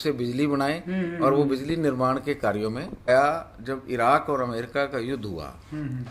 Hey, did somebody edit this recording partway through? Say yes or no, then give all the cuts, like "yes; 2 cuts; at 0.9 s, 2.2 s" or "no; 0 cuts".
yes; 1 cut; at 3.1 s